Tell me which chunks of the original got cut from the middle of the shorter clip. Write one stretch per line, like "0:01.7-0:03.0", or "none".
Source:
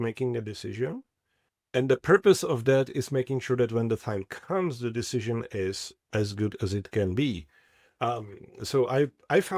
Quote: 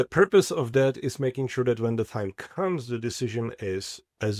none